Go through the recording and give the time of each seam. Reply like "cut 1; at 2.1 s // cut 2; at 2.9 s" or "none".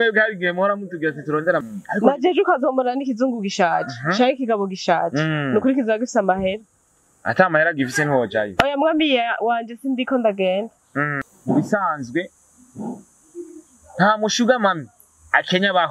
cut 1; at 1.8 s // cut 2; at 11.2 s

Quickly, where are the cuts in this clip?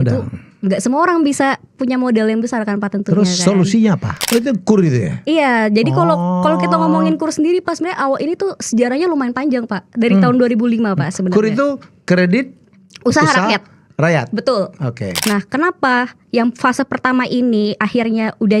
cut 1; at 4.1 s // cut 2; at 15.1 s

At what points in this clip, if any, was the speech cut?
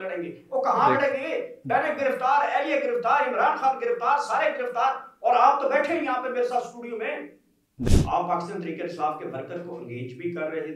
cut 1; at 7.9 s

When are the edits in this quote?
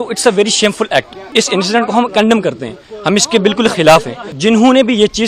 cut 1; at 1.2 s // cut 2; at 4.3 s

